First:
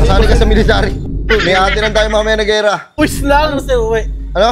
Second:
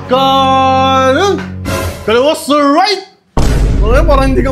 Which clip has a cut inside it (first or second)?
first